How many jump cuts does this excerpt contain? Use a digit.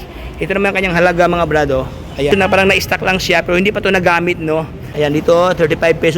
2